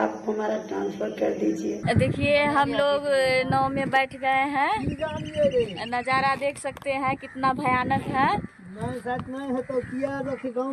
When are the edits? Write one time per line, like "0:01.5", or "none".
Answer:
0:01.8